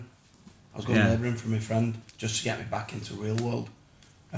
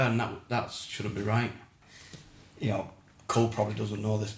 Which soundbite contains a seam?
second; 1 cut; at 1.8 s

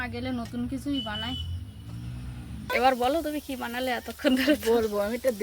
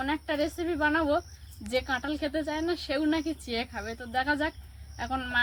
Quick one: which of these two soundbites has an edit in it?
first; 1 cut; at 2.7 s

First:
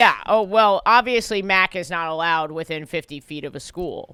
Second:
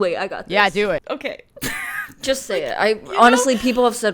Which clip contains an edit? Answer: second; 1 cut; at 1.0 s

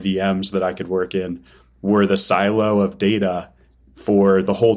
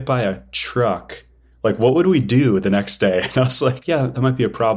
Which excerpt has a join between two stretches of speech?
second; 1 cut; at 3.8 s

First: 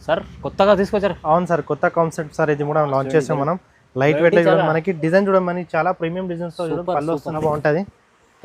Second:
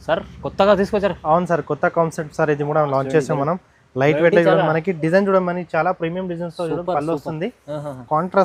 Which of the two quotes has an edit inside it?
first; 1 cut; at 7.4 s

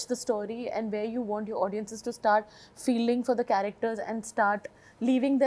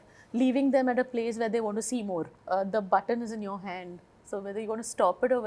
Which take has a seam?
second; 1 cut; at 2.4 s

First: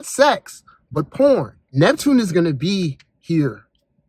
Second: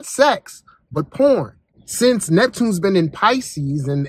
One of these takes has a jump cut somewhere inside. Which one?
first; 1 cut; at 1.6 s

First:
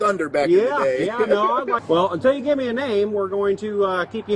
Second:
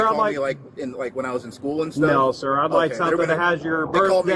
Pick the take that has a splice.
first; 1 cut; at 1.8 s

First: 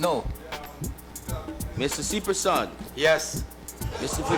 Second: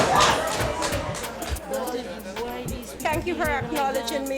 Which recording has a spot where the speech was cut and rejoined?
second; 1 cut; at 1.6 s

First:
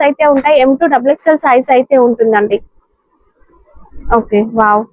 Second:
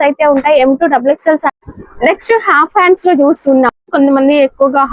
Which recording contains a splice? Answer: second; 1 cut; at 1.4 s

